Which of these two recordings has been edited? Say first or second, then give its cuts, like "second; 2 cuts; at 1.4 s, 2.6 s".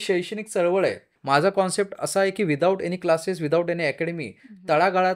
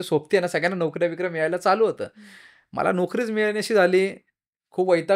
first; 1 cut; at 1.1 s